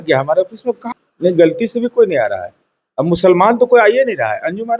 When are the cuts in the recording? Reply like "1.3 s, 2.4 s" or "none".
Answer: 0.9 s